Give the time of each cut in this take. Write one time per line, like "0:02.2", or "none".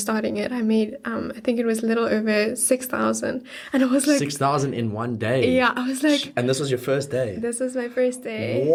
none